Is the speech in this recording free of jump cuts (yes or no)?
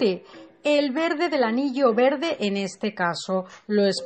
yes